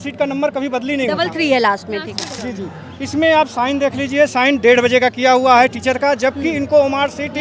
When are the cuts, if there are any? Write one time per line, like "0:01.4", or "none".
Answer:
0:02.3